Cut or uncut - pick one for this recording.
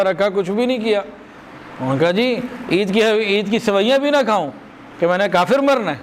uncut